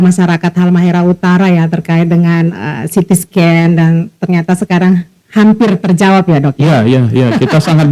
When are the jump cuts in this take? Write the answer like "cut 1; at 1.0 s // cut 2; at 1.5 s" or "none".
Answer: none